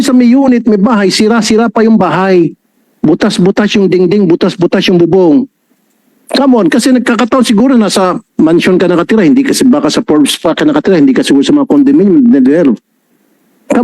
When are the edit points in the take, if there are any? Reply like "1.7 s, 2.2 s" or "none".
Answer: none